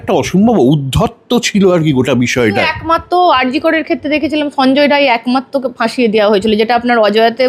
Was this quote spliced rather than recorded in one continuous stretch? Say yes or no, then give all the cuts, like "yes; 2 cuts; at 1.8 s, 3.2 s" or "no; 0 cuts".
no; 0 cuts